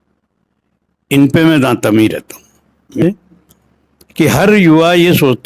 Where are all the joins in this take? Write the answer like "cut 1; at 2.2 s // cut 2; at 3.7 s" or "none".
cut 1; at 3.0 s